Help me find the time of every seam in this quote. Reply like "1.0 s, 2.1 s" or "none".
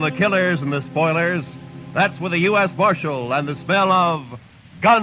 none